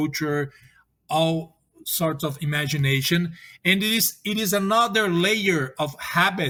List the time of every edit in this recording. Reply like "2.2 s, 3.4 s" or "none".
none